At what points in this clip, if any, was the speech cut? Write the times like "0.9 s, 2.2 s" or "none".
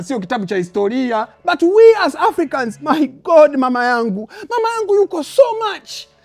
1.3 s

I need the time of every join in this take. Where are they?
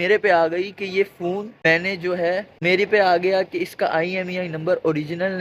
none

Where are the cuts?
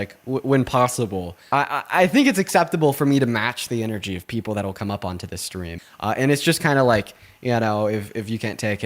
1.3 s, 5.8 s

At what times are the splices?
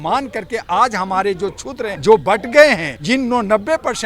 1.9 s, 2.9 s

